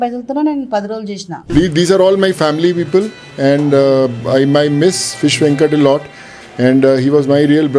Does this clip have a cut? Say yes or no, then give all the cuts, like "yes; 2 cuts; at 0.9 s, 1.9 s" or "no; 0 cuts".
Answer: yes; 1 cut; at 1.3 s